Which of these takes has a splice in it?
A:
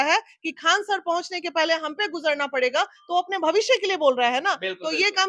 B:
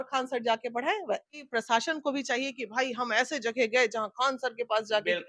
B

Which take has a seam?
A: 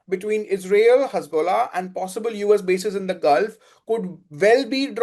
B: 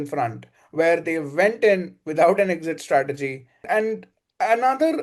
B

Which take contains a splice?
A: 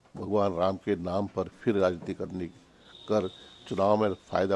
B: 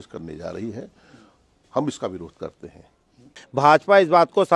B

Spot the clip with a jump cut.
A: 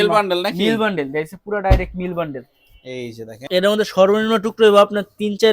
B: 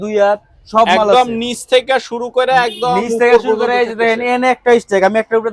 A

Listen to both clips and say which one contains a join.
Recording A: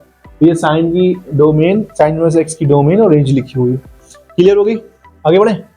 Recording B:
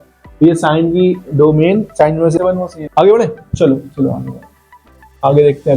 B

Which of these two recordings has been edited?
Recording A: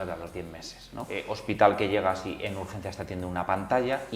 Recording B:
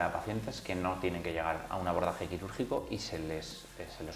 A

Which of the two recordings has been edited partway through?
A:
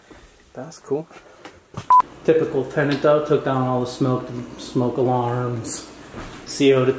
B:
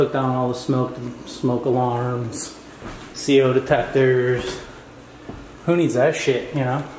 A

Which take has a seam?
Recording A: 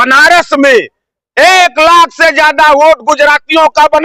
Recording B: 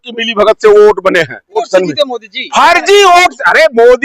B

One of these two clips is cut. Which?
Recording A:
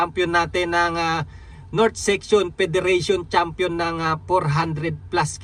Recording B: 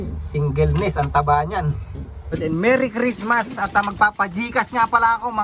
B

